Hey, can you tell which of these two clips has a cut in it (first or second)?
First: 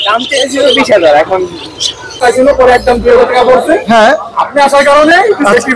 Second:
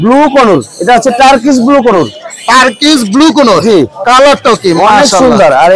first